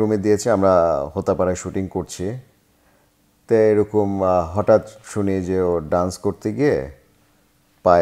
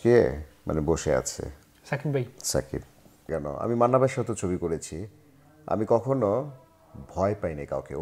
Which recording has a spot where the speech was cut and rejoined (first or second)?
second